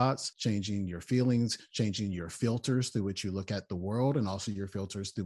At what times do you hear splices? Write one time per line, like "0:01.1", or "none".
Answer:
none